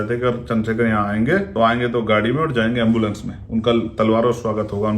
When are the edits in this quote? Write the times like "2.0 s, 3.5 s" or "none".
1.5 s

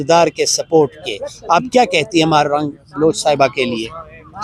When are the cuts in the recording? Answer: none

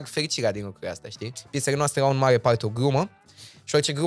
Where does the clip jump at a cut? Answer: 1.4 s

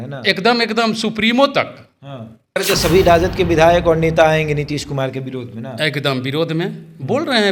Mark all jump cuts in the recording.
2.6 s

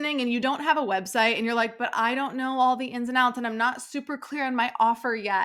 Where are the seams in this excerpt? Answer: none

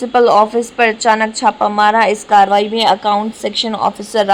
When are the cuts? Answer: none

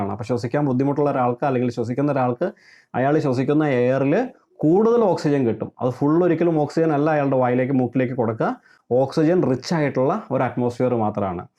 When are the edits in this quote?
none

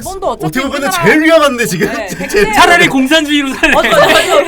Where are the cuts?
none

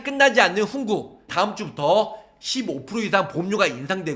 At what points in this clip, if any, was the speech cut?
none

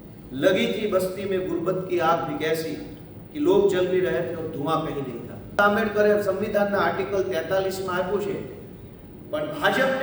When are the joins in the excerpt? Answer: 5.6 s

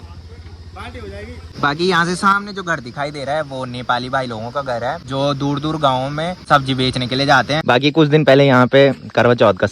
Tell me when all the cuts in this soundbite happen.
1.5 s, 5.0 s, 6.4 s, 7.6 s

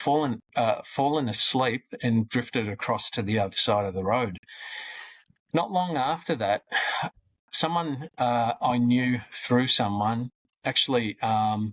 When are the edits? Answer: none

